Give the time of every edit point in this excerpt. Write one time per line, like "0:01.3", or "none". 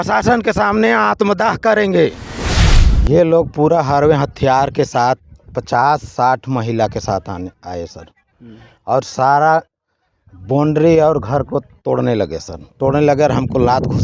0:02.8